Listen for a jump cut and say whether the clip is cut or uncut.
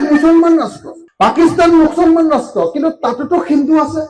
uncut